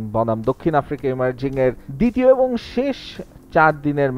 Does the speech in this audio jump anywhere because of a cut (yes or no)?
yes